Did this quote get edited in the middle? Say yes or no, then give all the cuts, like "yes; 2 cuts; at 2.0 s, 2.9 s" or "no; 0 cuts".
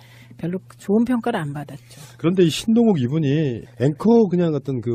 yes; 1 cut; at 3.0 s